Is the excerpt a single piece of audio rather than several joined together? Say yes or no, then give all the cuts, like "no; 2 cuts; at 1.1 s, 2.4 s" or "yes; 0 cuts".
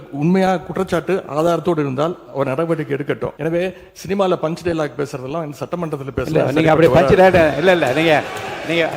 no; 1 cut; at 3.3 s